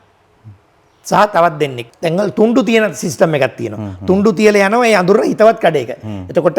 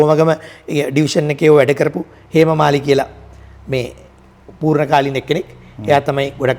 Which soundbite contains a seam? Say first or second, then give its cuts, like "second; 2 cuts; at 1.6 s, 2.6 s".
first; 1 cut; at 1.8 s